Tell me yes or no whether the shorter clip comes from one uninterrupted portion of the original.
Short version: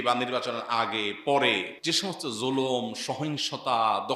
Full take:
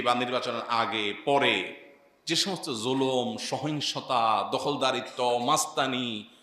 no